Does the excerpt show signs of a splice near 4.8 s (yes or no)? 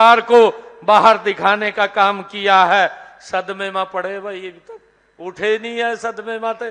no